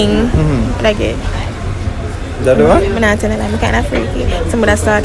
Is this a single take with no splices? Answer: yes; 0 cuts

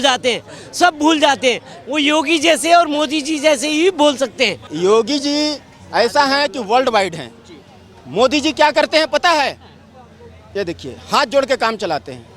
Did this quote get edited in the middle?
yes; 1 cut; at 4.7 s

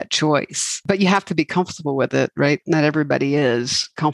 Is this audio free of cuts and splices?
no; 2 cuts; at 0.8 s, 2.6 s

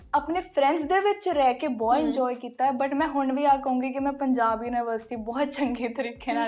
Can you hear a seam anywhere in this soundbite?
no; 0 cuts

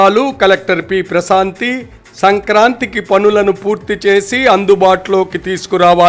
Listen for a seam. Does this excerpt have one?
no; 0 cuts

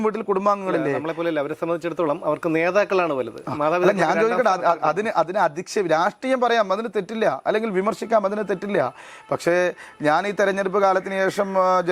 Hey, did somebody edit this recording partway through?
no; 0 cuts

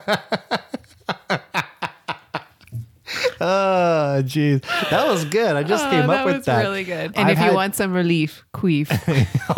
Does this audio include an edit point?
yes; 1 cut; at 7.1 s

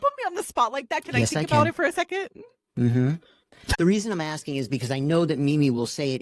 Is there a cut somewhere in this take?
yes; 1 cut; at 3.6 s

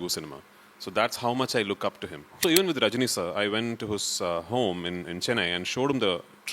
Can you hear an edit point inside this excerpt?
yes; 1 cut; at 2.4 s

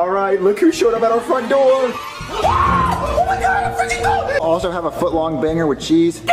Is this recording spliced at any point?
yes; 1 cut; at 4.4 s

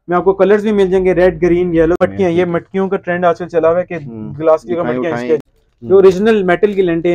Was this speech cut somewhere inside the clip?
yes; 2 cuts; at 2.0 s, 5.5 s

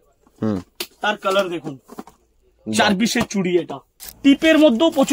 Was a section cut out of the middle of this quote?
yes; 1 cut; at 4.0 s

